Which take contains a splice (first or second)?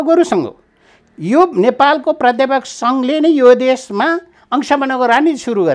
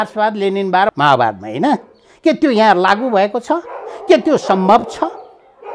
second